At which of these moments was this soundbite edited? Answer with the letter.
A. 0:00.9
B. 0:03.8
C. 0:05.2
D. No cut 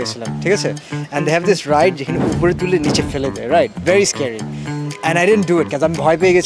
D